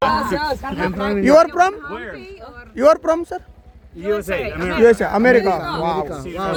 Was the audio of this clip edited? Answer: no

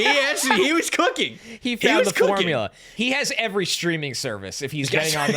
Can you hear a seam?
yes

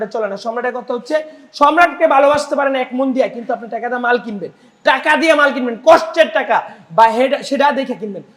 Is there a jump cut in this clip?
no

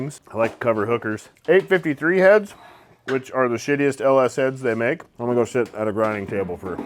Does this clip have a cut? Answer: yes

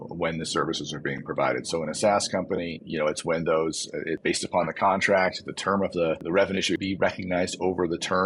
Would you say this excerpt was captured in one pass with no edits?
no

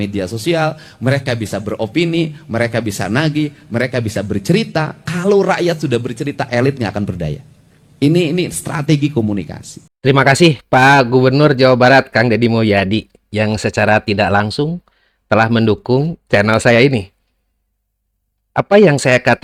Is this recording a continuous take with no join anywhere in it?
yes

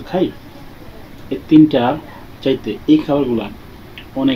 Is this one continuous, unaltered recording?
yes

